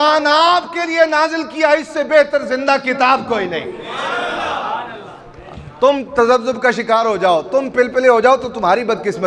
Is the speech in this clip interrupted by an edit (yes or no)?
no